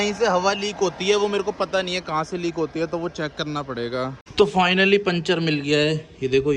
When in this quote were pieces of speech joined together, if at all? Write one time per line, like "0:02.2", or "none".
0:04.2